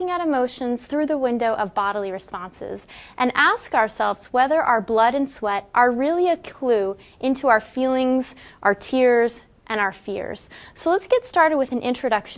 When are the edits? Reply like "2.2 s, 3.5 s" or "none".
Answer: 11.2 s